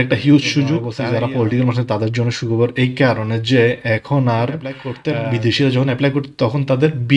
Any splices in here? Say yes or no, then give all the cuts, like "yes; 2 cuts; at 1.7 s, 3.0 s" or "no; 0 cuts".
yes; 2 cuts; at 0.9 s, 4.9 s